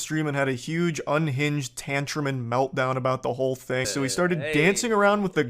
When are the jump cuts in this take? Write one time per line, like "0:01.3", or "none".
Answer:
0:03.9